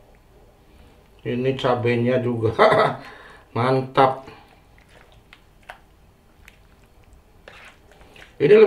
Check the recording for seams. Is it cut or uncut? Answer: cut